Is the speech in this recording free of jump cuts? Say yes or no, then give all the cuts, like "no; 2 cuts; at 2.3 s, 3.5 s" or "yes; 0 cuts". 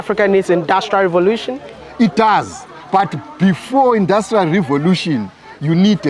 no; 1 cut; at 1.8 s